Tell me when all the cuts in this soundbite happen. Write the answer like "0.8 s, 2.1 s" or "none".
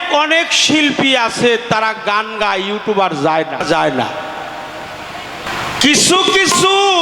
3.6 s, 5.5 s